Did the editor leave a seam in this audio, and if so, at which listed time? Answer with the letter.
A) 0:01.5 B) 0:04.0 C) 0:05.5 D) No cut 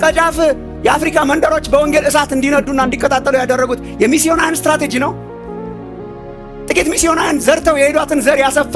D